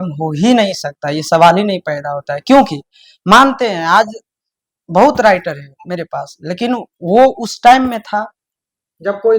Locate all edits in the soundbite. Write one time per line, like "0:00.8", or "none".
none

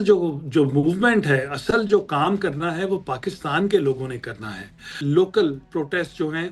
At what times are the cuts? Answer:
0:05.0

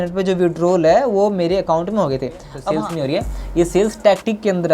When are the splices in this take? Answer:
0:02.5

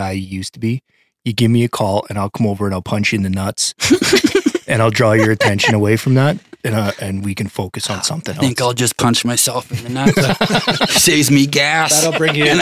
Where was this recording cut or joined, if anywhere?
none

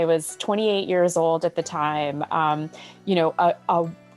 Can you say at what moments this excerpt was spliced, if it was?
none

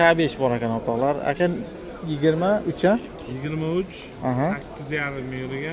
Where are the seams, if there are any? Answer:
none

